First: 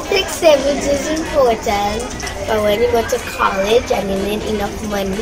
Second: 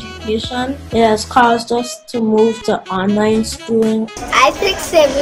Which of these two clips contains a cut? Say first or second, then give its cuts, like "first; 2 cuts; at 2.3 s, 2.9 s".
second; 1 cut; at 0.9 s